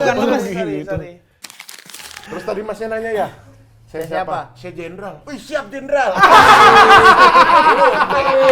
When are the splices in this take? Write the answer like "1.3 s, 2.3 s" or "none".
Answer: 1.6 s